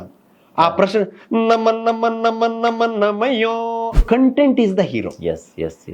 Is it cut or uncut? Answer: cut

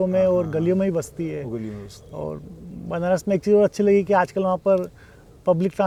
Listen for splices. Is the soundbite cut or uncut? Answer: uncut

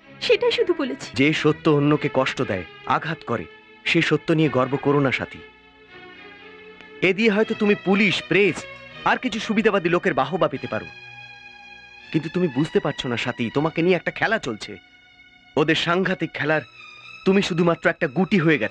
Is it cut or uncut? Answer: uncut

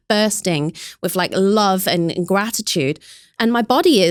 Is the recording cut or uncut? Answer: uncut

